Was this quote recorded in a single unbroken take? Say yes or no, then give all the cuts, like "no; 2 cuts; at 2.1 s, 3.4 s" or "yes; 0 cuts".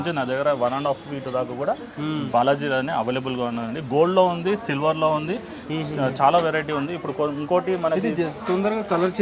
yes; 0 cuts